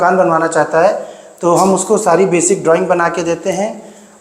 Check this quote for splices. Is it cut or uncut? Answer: uncut